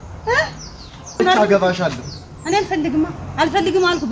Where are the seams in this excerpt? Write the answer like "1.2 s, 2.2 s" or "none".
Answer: 1.2 s